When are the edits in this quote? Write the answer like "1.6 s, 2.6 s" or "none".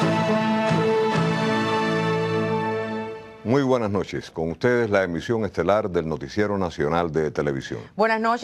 none